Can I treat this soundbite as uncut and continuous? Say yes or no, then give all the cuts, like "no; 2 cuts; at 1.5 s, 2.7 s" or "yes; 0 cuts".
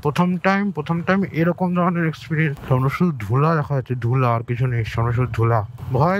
no; 1 cut; at 2.6 s